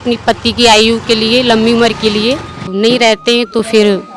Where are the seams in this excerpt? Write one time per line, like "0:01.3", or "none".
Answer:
0:02.7